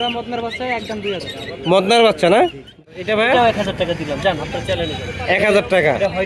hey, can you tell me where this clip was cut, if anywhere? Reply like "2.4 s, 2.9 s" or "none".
2.8 s